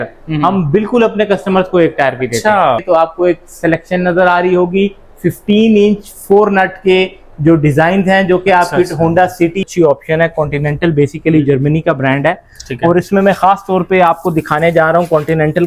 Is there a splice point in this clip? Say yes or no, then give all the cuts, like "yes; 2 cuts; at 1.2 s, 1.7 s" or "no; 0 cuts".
yes; 2 cuts; at 2.8 s, 9.6 s